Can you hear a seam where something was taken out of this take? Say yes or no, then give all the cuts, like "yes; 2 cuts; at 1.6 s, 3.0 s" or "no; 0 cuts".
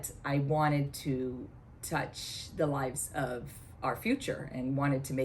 no; 0 cuts